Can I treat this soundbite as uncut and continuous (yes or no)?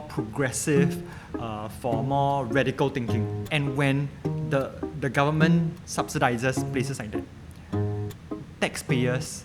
no